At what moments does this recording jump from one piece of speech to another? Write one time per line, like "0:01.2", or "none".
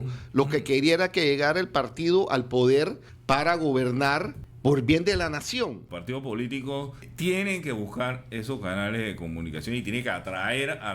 0:03.1
0:04.4
0:05.8
0:07.1